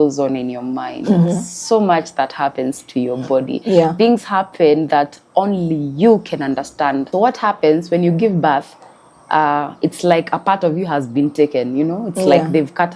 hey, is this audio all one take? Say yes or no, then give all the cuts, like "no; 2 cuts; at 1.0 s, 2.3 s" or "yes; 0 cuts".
no; 1 cut; at 7.1 s